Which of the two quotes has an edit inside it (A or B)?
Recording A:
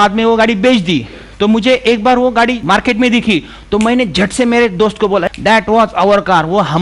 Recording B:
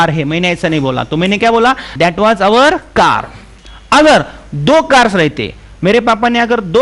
A